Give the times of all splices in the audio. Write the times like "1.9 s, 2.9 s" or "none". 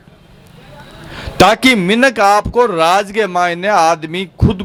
none